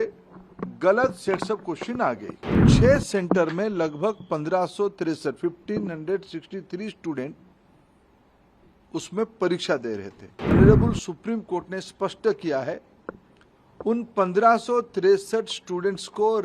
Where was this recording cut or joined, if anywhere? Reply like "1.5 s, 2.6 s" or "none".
2.7 s, 10.5 s

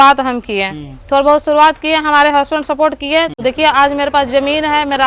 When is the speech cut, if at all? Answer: none

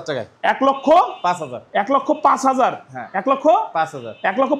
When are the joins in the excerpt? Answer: none

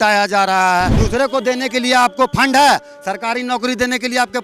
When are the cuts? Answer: 1.0 s

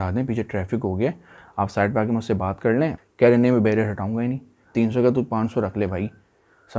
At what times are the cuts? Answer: 1.4 s, 3.0 s, 4.7 s

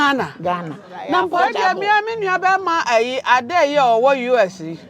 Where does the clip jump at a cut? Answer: 1.3 s

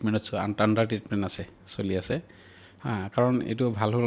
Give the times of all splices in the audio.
none

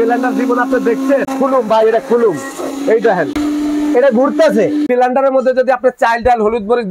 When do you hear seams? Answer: 1.3 s, 3.3 s, 4.9 s

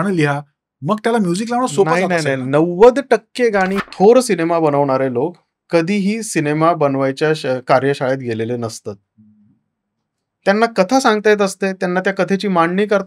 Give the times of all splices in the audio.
3.8 s

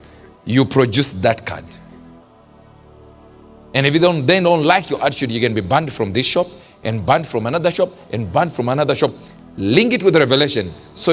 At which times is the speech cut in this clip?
1.6 s, 3.0 s

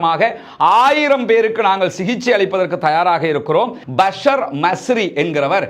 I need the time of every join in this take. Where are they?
3.8 s

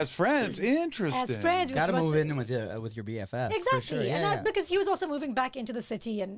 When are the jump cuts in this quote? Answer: none

